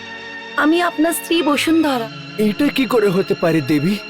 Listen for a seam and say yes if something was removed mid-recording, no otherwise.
yes